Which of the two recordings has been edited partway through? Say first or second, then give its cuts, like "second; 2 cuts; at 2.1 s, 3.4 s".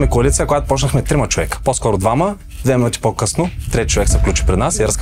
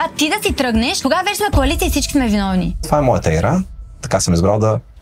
second; 2 cuts; at 0.9 s, 2.9 s